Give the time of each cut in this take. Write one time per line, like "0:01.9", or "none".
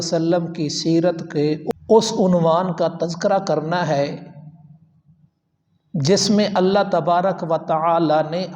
0:01.7